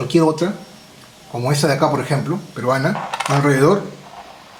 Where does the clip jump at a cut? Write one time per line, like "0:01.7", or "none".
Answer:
none